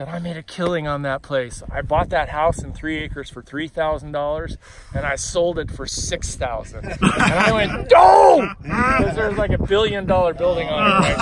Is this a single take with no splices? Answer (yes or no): yes